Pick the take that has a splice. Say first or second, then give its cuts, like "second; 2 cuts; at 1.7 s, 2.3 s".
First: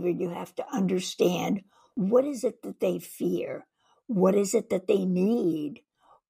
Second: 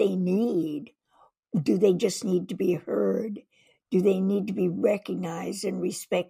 first; 1 cut; at 1.8 s